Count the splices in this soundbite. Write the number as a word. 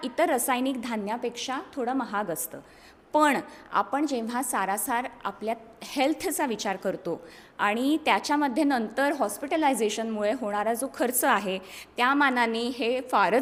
zero